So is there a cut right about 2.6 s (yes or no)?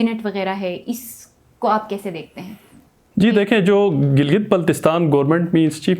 no